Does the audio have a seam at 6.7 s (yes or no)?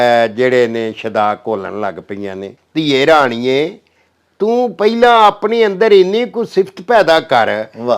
no